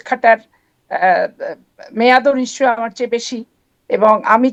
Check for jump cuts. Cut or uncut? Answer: uncut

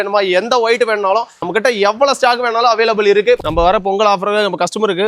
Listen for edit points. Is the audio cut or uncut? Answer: cut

